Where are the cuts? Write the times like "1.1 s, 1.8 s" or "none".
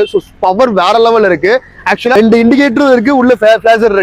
2.1 s

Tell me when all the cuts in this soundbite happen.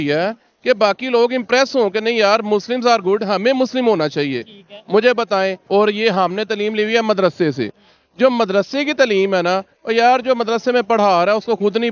5.6 s

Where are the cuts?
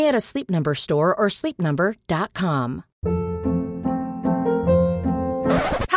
2.9 s

